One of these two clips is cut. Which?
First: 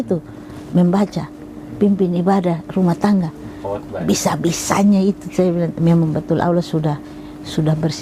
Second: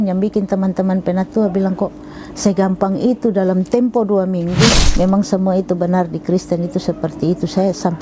second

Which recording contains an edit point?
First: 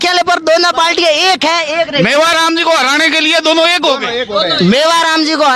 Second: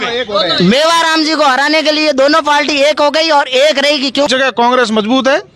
second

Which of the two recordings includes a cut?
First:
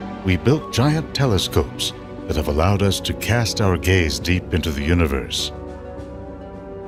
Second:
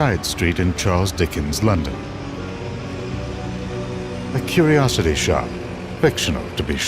second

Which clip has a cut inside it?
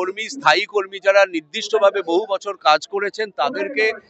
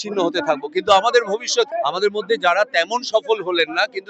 second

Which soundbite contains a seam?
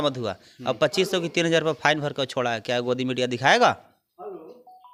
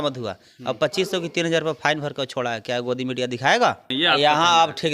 second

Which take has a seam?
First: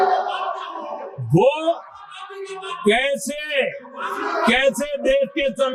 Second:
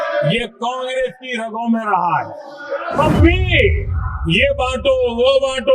second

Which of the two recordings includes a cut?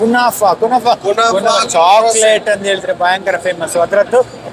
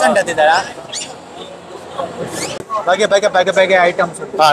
second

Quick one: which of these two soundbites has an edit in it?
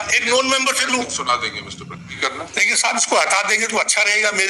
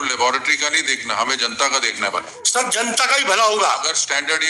first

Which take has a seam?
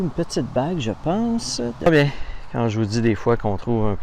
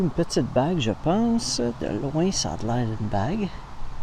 first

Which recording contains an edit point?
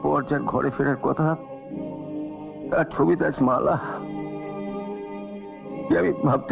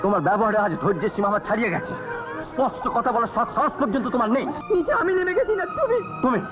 second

